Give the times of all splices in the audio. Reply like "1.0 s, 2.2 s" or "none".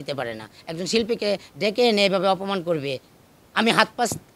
none